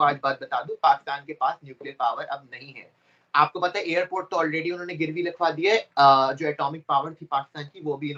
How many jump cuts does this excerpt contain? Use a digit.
0